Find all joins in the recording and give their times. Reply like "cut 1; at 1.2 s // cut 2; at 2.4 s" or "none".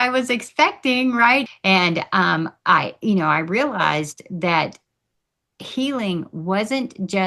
cut 1; at 1.5 s